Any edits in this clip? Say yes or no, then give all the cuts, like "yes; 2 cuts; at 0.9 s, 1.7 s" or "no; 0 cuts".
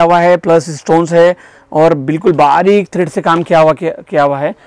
no; 0 cuts